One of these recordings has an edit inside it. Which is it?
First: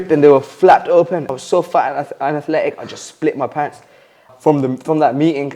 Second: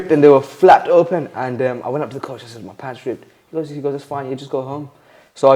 first; 2 cuts; at 1.3 s, 4.3 s

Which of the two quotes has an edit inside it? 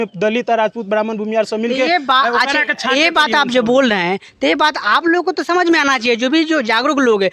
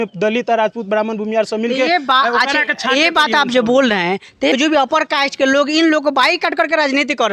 second; 1 cut; at 4.5 s

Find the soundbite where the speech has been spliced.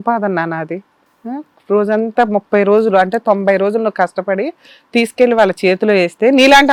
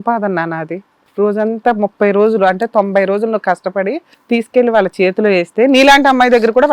second; 2 cuts; at 1.0 s, 4.1 s

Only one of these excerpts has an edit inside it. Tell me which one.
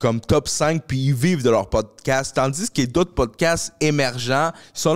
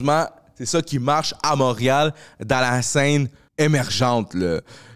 second; 1 cut; at 3.4 s

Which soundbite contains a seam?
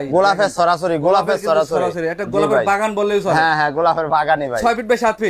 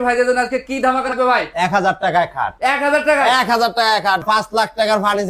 second; 2 cuts; at 1.1 s, 4.2 s

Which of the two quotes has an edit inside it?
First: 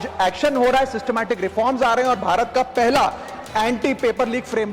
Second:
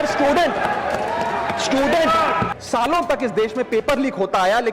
second; 1 cut; at 2.5 s

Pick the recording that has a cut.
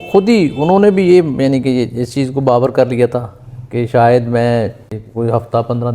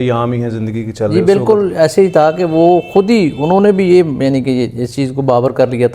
first; 1 cut; at 5.0 s

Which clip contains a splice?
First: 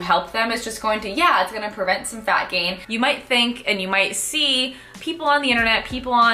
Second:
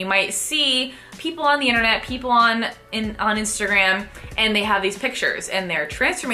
first; 1 cut; at 2.8 s

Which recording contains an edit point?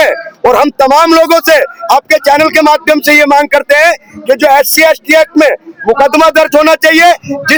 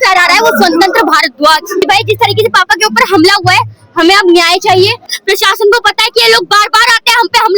second; 2 cuts; at 1.8 s, 5.1 s

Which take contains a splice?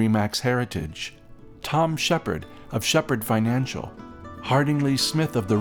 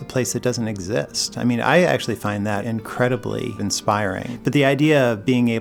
second; 2 cuts; at 2.6 s, 4.0 s

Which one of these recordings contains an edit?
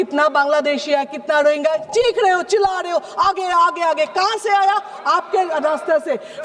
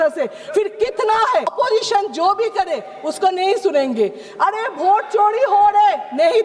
second; 1 cut; at 1.5 s

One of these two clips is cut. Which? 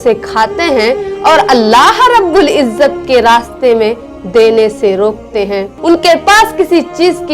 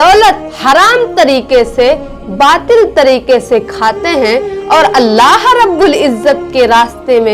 first; 1 cut; at 5.7 s

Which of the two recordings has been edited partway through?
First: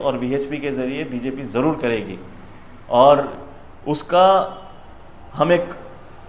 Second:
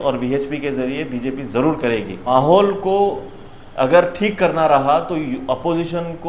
second; 1 cut; at 2.3 s

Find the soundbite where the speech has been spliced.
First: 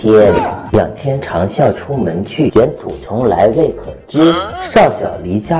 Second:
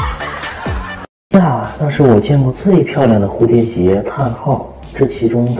second; 1 cut; at 1.2 s

